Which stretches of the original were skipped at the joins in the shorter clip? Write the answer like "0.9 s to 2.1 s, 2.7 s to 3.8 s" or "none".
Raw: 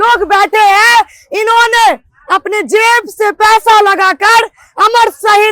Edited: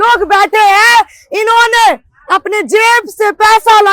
none